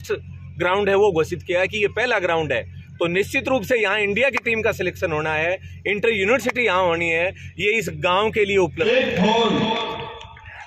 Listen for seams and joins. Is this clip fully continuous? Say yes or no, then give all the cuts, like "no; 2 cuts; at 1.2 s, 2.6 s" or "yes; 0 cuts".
no; 1 cut; at 8.8 s